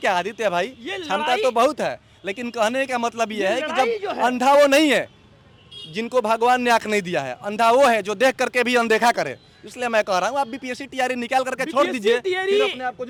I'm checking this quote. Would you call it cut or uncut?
uncut